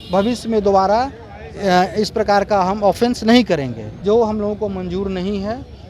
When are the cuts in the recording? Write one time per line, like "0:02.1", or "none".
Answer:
0:03.8